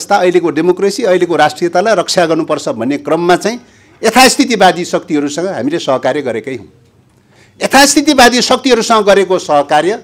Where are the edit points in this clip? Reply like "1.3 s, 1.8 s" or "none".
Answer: none